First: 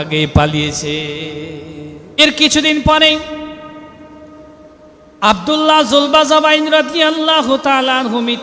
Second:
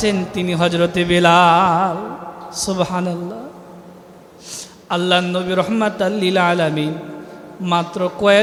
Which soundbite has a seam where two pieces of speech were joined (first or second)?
first